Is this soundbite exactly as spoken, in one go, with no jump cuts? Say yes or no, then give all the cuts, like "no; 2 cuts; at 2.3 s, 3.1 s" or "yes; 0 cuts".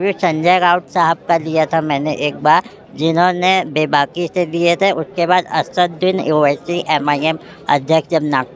yes; 0 cuts